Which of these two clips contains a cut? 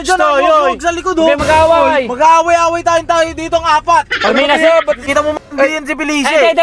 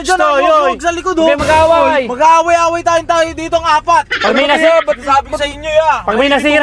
first; 1 cut; at 5.0 s

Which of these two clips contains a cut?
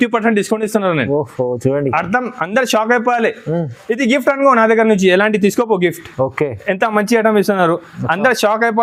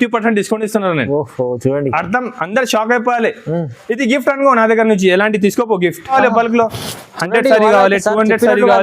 second; 1 cut; at 6.1 s

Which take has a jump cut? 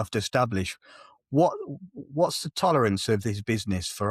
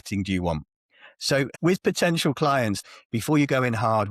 second; 2 cuts; at 1.5 s, 2.8 s

